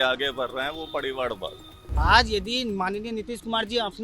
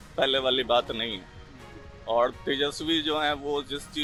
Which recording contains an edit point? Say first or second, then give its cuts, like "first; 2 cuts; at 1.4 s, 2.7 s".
first; 1 cut; at 2.0 s